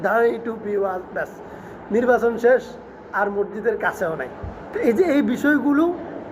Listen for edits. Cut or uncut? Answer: cut